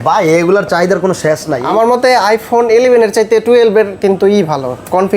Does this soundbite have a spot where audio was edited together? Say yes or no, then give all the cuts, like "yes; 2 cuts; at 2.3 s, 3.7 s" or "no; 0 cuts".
yes; 1 cut; at 1.6 s